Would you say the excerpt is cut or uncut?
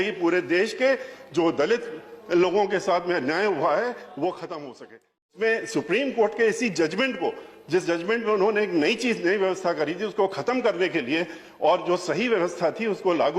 cut